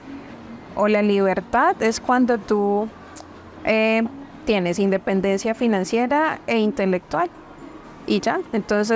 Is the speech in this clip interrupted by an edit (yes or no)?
no